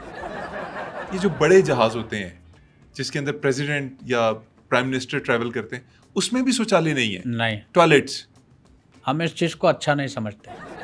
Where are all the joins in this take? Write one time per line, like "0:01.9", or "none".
none